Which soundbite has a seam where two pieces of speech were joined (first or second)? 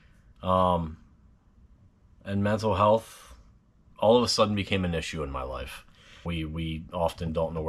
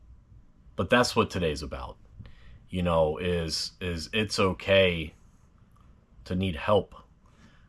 first